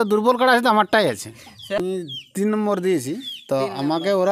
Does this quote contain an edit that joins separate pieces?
yes; 1 cut; at 1.8 s

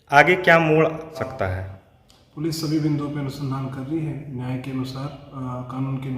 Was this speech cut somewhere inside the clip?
yes; 1 cut; at 1.2 s

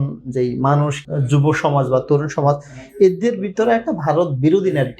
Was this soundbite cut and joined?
yes; 1 cut; at 1.0 s

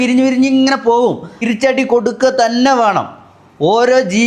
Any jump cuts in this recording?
yes; 1 cut; at 1.4 s

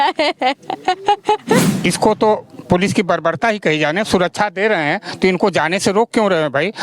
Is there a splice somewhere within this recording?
yes; 1 cut; at 1.7 s

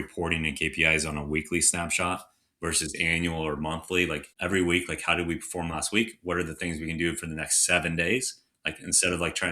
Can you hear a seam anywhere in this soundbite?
yes; 1 cut; at 4.3 s

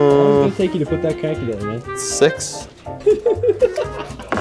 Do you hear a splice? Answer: yes; 1 cut; at 2.8 s

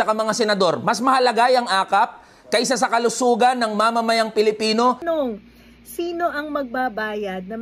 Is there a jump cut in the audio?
yes; 1 cut; at 5.0 s

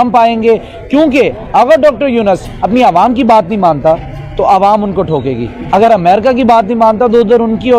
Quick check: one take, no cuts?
yes; 0 cuts

